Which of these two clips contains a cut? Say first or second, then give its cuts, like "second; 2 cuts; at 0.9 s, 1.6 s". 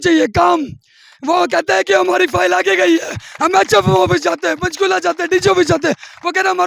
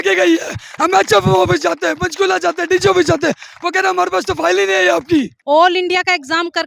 second; 1 cut; at 5.4 s